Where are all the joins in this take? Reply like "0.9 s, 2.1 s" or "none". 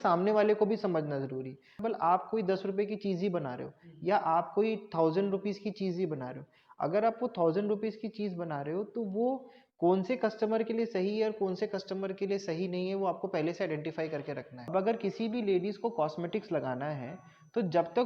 1.8 s, 14.7 s